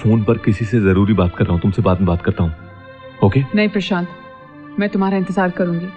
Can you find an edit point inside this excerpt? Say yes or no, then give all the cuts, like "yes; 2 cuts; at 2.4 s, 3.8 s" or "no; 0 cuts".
no; 0 cuts